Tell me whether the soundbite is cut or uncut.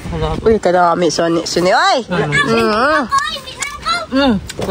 uncut